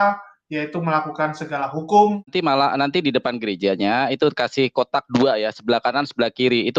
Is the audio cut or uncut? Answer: cut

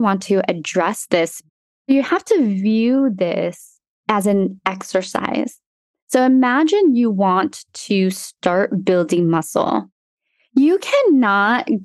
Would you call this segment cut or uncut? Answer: cut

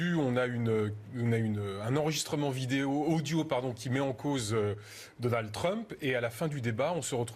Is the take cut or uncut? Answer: cut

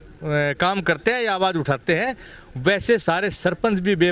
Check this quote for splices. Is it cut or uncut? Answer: uncut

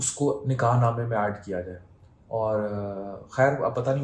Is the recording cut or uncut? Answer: uncut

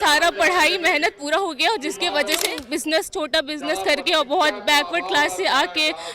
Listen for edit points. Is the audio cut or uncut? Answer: cut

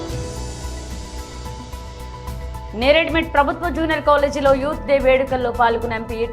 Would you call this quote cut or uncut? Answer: uncut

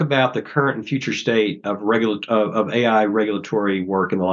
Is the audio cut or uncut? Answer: uncut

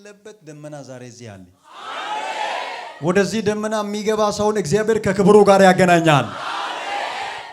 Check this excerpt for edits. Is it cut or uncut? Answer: uncut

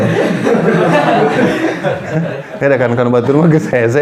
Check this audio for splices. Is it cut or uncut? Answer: uncut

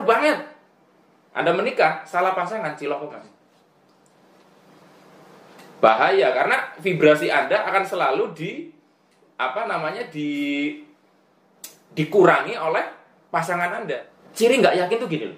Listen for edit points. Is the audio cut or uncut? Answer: cut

